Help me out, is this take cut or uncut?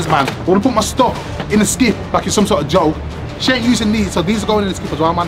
uncut